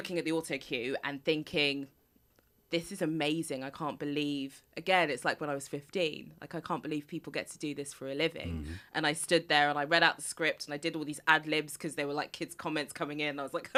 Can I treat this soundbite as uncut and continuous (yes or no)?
yes